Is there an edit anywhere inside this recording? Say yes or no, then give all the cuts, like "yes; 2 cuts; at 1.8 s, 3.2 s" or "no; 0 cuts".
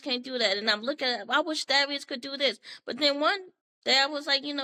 no; 0 cuts